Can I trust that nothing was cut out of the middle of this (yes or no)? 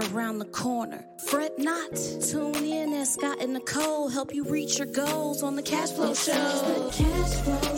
no